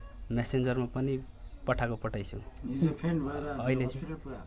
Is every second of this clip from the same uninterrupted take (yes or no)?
yes